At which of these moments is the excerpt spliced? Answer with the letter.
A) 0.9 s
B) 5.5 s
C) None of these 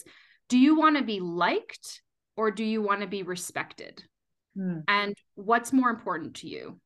C